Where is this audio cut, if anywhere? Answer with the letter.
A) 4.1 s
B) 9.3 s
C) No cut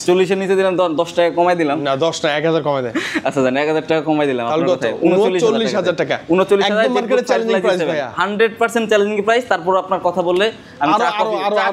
C